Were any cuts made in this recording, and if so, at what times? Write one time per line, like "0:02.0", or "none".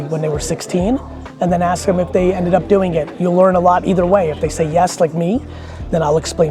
none